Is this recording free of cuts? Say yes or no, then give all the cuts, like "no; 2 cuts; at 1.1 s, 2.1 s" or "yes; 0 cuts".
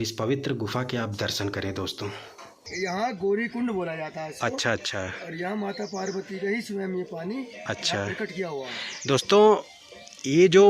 no; 1 cut; at 2.6 s